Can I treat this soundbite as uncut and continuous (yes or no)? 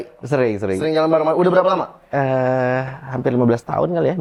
yes